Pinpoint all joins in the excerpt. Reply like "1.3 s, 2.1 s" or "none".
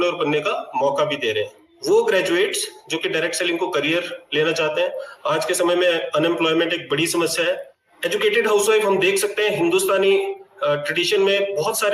1.7 s, 7.7 s